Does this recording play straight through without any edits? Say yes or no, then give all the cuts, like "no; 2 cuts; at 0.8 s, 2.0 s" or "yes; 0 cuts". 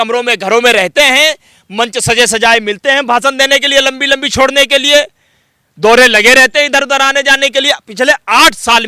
yes; 0 cuts